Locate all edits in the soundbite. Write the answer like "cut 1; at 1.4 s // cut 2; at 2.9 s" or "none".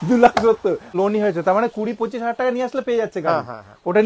cut 1; at 0.9 s